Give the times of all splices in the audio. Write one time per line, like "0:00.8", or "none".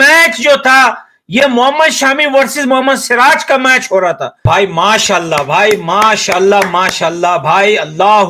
0:04.4